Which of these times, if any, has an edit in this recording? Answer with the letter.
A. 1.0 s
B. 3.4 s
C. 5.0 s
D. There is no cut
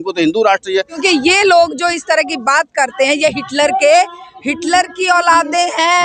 A